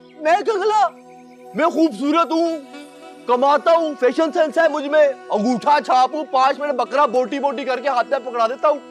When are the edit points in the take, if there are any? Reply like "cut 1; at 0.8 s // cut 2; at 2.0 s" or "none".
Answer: none